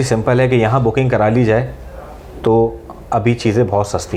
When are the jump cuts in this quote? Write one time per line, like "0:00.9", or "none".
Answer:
none